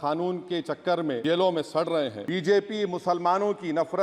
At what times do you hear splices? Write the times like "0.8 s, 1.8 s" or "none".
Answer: 1.2 s, 2.2 s